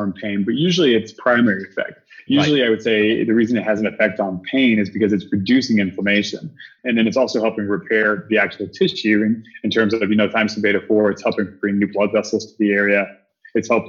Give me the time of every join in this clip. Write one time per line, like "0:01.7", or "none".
0:06.7